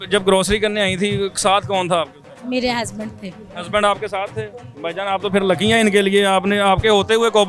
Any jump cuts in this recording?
no; 0 cuts

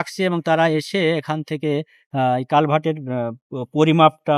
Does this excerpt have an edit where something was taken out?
no; 0 cuts

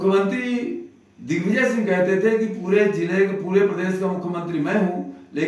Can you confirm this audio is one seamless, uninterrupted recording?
yes; 0 cuts

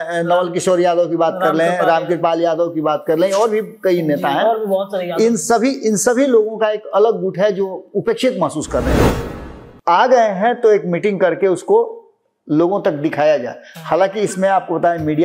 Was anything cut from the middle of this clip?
yes; 1 cut; at 9.1 s

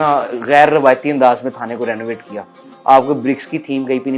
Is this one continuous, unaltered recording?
yes; 0 cuts

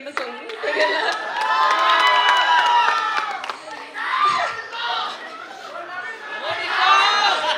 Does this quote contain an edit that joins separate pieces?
no; 0 cuts

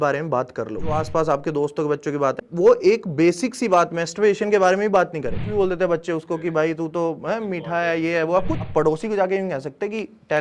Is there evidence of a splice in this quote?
yes; 4 cuts; at 1.0 s, 2.4 s, 5.5 s, 8.6 s

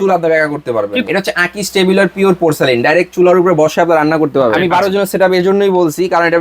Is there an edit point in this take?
yes; 2 cuts; at 1.1 s, 4.6 s

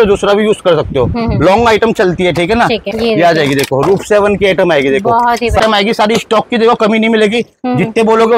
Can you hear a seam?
yes; 2 cuts; at 2.8 s, 5.6 s

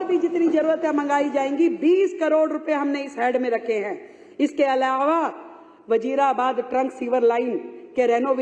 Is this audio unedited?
yes; 0 cuts

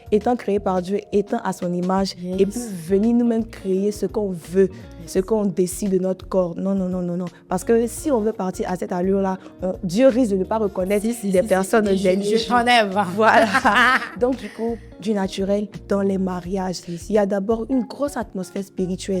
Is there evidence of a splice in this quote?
yes; 1 cut; at 15.8 s

